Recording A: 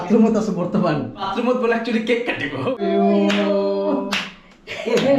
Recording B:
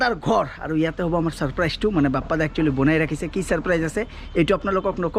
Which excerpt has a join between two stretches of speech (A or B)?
A